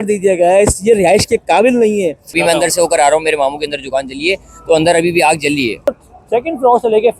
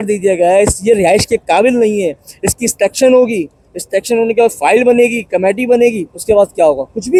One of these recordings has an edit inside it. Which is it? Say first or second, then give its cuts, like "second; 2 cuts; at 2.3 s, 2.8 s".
first; 2 cuts; at 2.4 s, 5.9 s